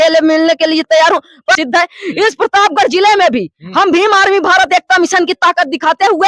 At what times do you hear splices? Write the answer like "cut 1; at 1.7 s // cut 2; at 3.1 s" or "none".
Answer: cut 1; at 1.5 s